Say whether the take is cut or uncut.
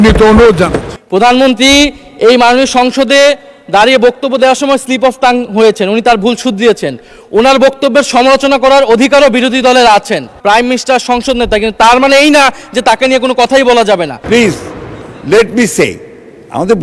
cut